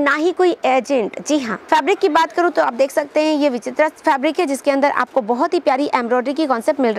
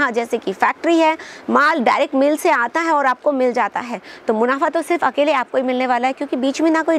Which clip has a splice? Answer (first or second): first